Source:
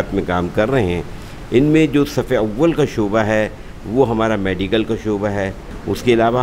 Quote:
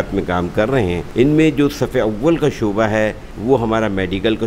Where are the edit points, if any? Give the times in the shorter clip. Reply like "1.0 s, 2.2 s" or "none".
1.0 s, 3.3 s